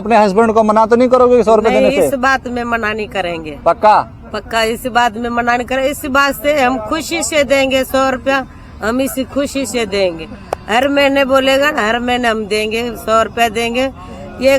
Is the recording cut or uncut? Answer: uncut